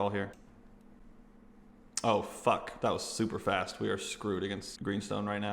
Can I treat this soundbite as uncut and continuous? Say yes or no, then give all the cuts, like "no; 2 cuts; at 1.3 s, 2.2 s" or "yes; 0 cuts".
no; 2 cuts; at 1.0 s, 4.7 s